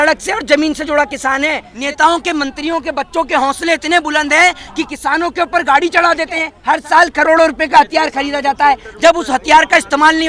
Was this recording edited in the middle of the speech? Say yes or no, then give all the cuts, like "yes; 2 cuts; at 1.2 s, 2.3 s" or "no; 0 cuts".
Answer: yes; 2 cuts; at 1.7 s, 6.5 s